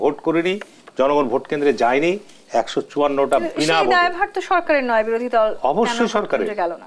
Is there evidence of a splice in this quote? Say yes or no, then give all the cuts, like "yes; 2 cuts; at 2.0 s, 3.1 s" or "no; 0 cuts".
no; 0 cuts